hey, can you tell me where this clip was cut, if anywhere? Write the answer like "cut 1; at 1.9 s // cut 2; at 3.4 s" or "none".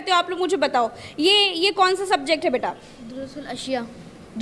none